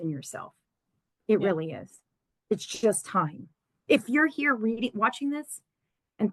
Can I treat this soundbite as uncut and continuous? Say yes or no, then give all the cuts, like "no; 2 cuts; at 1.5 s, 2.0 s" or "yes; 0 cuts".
yes; 0 cuts